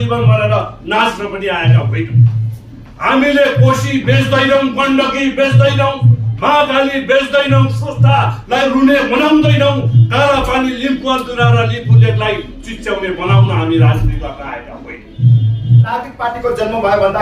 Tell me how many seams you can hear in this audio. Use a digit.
1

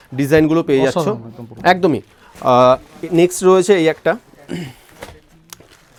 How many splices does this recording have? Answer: 0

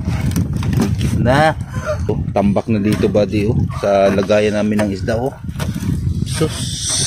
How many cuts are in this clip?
1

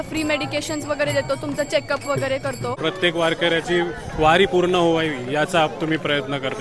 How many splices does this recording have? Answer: 1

